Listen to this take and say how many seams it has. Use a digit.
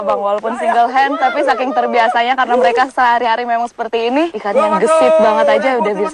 1